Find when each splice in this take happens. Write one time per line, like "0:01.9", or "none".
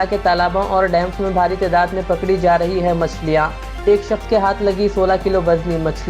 none